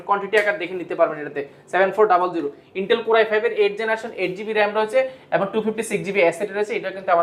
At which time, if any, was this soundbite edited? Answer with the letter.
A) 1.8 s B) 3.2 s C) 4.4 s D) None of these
D